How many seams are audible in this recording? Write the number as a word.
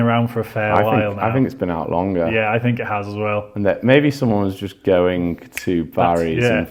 zero